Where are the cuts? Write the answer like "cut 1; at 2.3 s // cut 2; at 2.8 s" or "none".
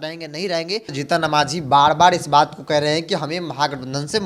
cut 1; at 0.9 s